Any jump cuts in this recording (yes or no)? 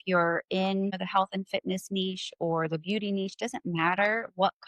yes